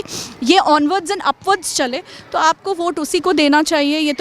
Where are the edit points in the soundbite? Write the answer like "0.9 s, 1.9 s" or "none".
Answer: none